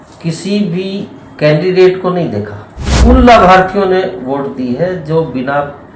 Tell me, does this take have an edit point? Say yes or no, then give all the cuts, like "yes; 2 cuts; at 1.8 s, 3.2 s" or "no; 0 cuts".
yes; 1 cut; at 2.9 s